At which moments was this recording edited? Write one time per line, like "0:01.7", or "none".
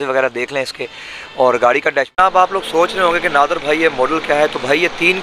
0:02.2

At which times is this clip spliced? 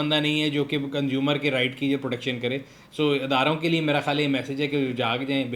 none

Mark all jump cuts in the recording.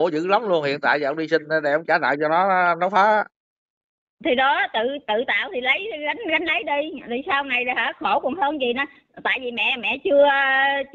none

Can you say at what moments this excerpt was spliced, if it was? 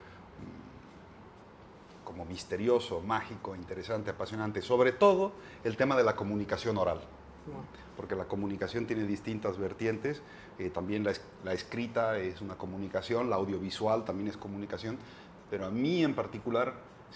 none

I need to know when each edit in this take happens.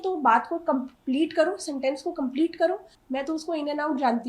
0:02.9

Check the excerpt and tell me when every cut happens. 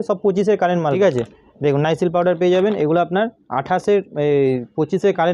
0:01.0

